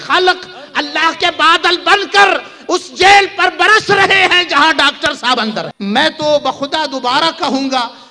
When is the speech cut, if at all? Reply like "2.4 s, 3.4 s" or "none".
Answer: 5.7 s